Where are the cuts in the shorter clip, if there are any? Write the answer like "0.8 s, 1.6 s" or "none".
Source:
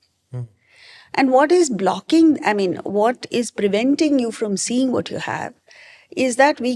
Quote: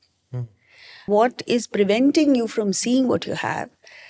1.0 s